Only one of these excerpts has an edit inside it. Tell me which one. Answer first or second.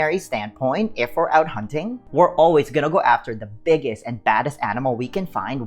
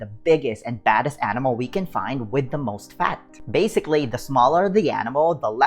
second